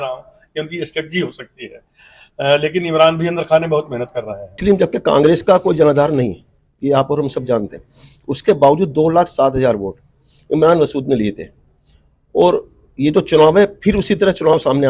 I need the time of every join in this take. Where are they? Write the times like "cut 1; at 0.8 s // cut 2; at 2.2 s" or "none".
cut 1; at 4.6 s